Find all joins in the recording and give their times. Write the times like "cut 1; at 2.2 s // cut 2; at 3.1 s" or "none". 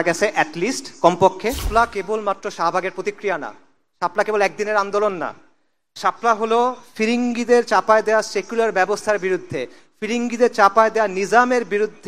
cut 1; at 1.7 s